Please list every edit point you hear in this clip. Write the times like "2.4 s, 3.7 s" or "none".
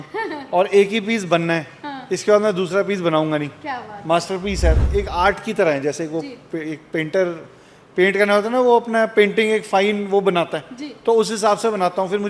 4.8 s

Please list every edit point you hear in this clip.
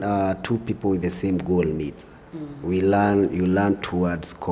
none

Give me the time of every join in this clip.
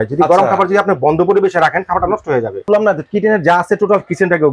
2.7 s

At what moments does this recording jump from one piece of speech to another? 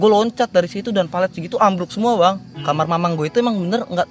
2.5 s

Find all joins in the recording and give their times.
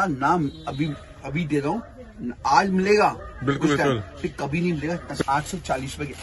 5.1 s

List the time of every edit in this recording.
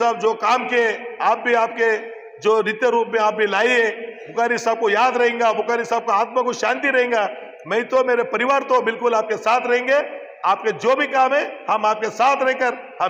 none

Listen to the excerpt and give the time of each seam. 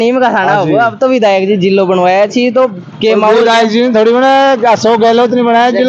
none

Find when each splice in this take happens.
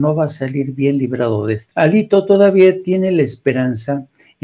1.6 s

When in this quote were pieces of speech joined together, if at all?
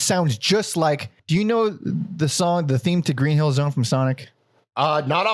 1.1 s

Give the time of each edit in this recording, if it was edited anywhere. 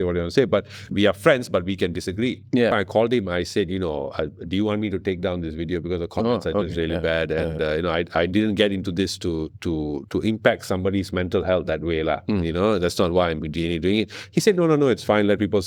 2.7 s

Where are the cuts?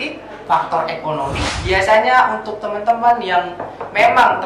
1.4 s

